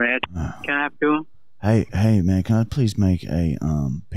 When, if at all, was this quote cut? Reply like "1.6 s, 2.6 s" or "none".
none